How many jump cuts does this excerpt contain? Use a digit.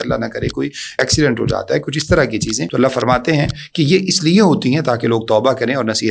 2